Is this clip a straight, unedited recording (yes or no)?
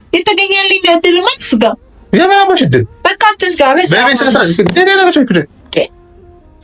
yes